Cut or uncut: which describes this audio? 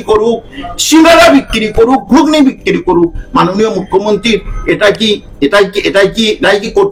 uncut